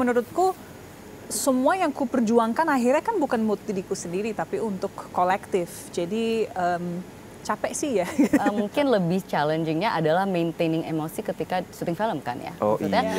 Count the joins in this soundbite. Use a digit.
1